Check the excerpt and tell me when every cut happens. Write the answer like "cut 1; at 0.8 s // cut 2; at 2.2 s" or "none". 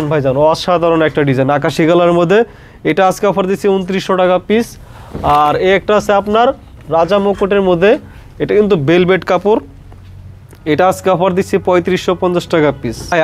none